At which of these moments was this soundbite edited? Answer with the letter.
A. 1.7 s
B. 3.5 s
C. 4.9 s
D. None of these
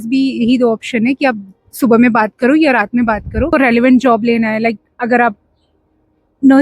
B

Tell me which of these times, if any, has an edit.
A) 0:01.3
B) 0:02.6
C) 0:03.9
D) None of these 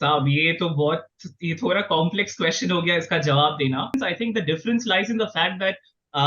C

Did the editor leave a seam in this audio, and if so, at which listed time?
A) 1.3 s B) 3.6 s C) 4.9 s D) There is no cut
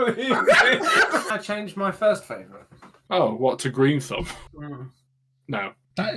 A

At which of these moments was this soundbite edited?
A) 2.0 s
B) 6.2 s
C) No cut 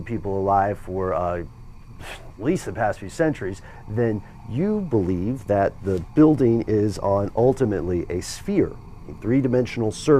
B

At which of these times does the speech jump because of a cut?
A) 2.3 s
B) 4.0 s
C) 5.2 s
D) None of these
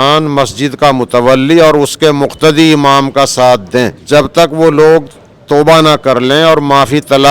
B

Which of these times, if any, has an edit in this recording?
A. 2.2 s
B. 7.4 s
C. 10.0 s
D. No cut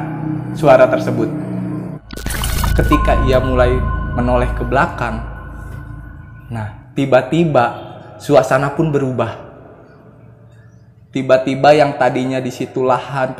A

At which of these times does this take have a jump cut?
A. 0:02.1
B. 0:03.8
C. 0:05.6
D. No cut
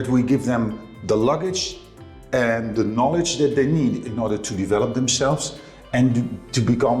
D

